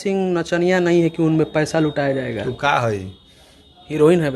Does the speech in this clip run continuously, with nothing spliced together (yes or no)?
yes